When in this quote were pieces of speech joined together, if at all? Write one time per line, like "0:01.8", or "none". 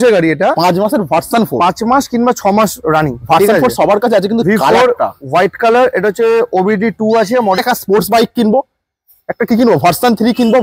0:07.6